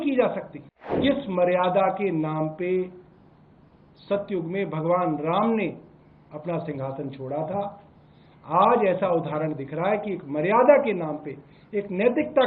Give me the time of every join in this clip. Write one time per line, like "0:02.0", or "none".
0:01.0

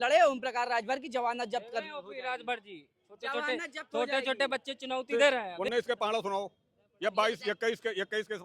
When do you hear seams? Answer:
0:05.5

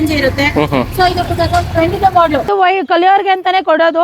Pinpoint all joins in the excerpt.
0:02.5

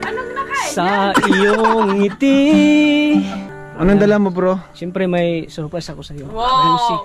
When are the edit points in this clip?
none

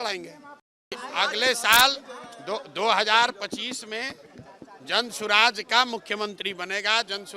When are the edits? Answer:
0:01.0

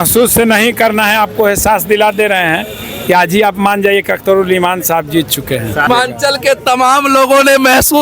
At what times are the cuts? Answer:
0:05.9

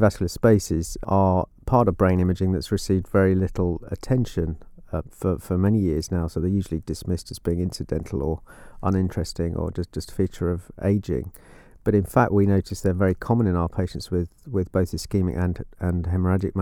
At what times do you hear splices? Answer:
0:01.0

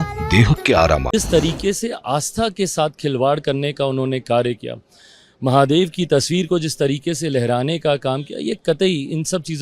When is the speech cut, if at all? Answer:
0:01.1

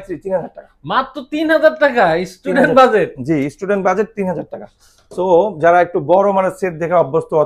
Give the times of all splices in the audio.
none

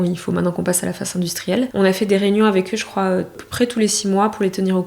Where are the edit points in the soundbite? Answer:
0:01.7
0:03.4

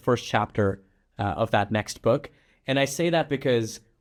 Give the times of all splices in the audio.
none

